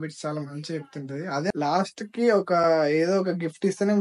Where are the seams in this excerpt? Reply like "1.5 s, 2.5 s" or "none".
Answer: 1.5 s